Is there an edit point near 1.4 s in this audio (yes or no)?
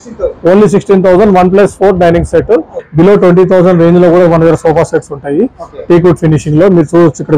no